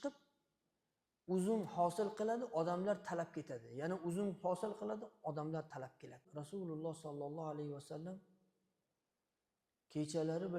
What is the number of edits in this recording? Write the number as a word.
one